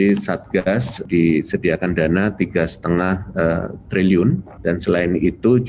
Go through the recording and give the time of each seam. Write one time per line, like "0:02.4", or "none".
0:00.9
0:04.5